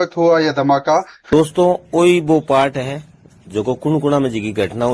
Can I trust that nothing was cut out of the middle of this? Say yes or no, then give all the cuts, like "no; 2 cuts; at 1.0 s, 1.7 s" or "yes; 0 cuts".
no; 1 cut; at 1.3 s